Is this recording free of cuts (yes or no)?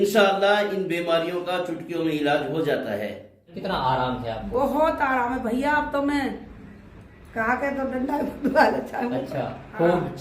no